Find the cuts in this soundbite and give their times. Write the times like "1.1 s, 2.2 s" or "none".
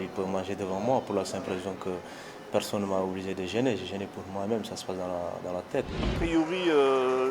6.1 s